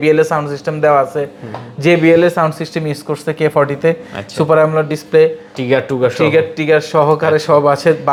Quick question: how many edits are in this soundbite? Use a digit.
0